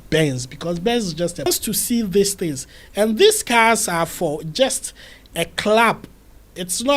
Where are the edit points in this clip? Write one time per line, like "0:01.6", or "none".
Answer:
0:01.5